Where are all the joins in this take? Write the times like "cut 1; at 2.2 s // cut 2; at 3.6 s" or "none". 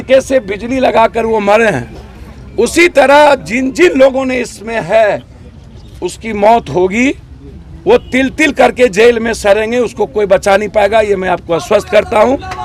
none